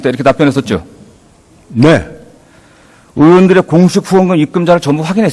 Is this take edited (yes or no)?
yes